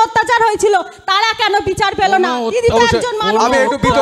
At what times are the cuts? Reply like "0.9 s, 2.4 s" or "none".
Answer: none